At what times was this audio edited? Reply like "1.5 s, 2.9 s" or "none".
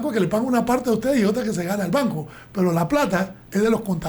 none